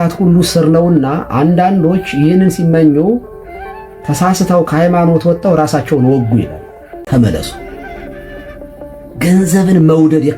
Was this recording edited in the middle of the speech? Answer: yes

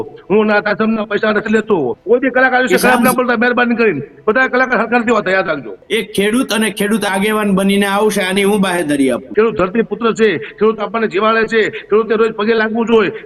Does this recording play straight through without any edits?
no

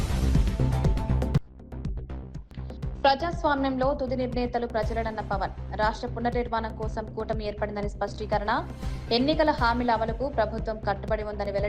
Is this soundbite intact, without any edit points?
no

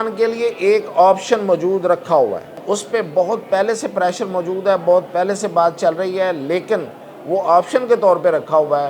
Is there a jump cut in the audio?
yes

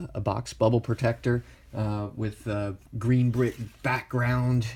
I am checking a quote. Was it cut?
yes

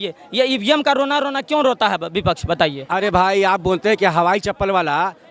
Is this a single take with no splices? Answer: no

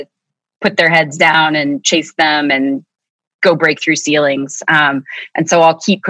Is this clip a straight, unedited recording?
yes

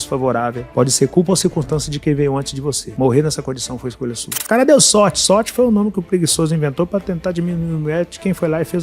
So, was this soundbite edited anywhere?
yes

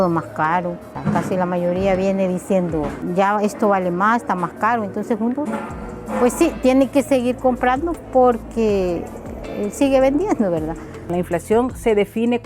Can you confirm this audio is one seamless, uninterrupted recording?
no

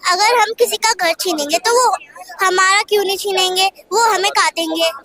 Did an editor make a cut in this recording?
no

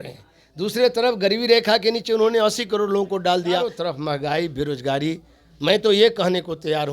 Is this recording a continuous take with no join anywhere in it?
no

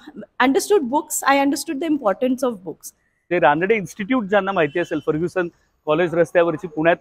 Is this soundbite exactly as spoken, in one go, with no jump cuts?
no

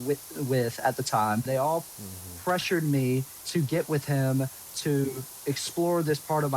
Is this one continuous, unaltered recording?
no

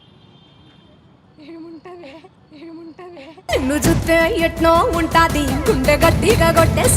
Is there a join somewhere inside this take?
no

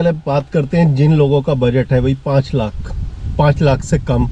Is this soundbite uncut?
yes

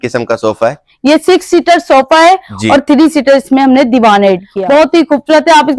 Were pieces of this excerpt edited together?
yes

